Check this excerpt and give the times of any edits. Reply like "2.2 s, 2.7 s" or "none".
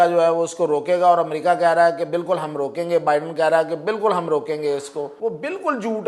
5.1 s